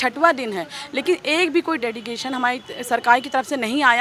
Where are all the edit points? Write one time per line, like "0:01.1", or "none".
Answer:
none